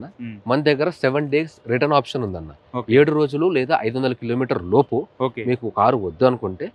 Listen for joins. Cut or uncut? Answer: uncut